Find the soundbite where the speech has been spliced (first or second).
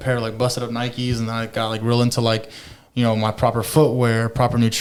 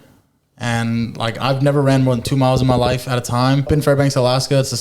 second